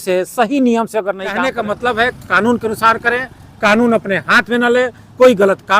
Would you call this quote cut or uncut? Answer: cut